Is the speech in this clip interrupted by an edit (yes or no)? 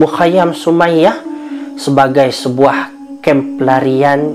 no